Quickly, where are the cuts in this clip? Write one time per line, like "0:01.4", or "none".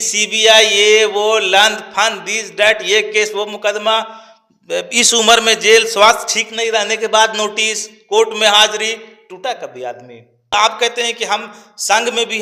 0:10.5